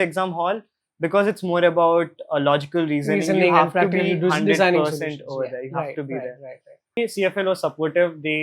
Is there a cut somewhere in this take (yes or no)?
yes